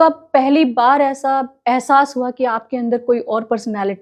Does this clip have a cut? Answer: no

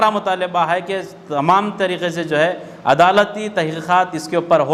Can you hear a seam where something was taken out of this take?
no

